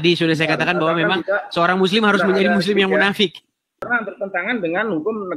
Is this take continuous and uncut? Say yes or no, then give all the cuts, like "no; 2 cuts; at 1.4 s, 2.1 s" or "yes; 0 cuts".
no; 1 cut; at 3.8 s